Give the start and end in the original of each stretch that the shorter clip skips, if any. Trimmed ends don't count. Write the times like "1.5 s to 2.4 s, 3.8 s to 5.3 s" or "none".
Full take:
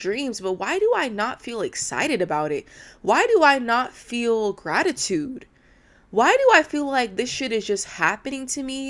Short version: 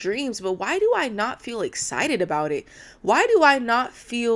none